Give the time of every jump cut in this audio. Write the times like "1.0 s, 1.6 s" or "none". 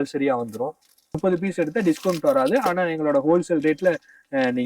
1.0 s